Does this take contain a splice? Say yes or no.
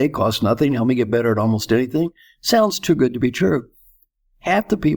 no